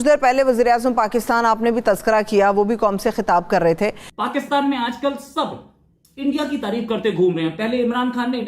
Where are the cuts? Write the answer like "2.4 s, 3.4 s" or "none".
4.1 s